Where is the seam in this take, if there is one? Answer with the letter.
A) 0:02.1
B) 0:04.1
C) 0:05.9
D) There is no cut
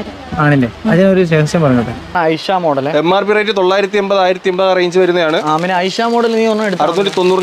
A